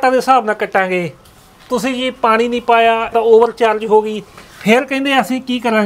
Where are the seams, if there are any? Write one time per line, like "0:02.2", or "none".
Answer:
0:03.1

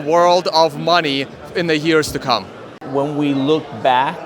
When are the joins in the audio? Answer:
0:02.8

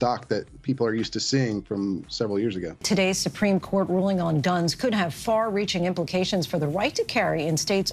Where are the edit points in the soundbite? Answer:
0:02.7

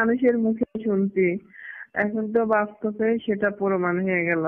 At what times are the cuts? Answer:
none

